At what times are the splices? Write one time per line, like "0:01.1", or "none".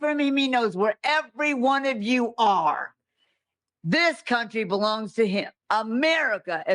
0:05.6

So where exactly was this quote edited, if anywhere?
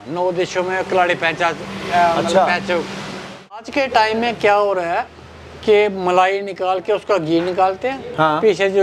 0:03.6

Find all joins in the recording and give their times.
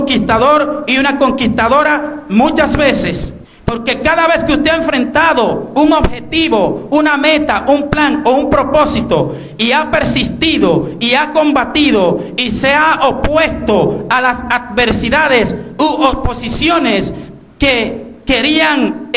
0:12.8

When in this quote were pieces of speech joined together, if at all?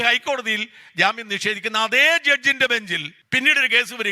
0:03.1

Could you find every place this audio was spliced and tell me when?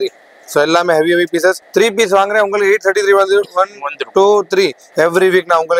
0:01.6
0:04.8

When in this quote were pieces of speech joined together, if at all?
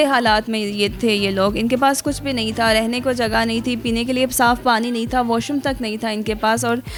none

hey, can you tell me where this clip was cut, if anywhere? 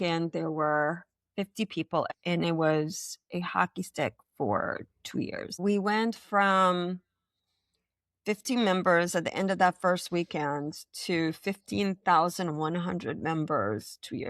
0:02.1
0:05.6

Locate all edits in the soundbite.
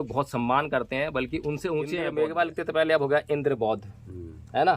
0:02.1

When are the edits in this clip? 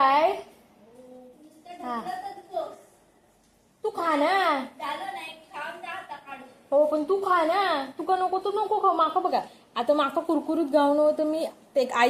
none

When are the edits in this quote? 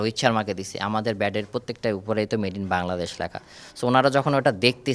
none

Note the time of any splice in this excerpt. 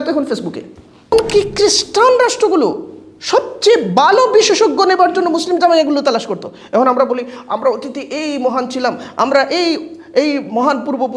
0:01.1

